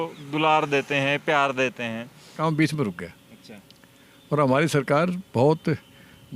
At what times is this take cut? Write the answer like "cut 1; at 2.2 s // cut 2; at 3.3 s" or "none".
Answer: cut 1; at 2.4 s